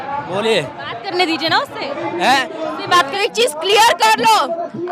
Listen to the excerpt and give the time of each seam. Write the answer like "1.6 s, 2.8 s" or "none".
3.1 s